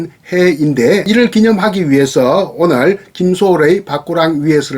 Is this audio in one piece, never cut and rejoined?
no; 1 cut; at 1.0 s

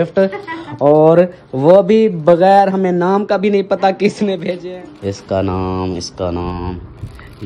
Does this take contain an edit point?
yes; 1 cut; at 4.6 s

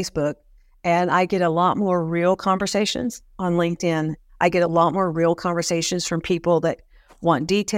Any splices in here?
yes; 1 cut; at 4.2 s

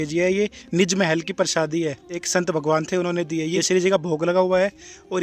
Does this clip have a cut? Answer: yes; 2 cuts; at 2.1 s, 3.6 s

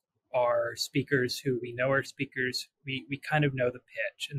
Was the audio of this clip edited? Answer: no; 0 cuts

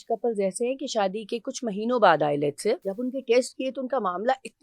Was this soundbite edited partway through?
yes; 1 cut; at 2.9 s

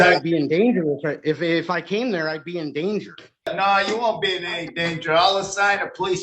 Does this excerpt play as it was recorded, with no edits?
no; 1 cut; at 3.5 s

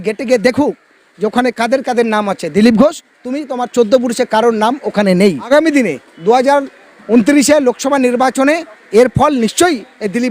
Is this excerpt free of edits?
no; 1 cut; at 5.5 s

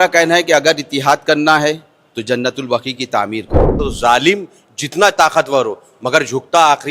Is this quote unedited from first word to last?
no; 1 cut; at 3.8 s

